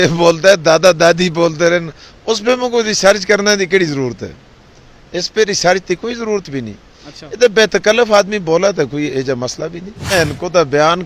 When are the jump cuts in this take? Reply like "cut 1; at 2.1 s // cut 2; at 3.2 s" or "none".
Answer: cut 1; at 10.1 s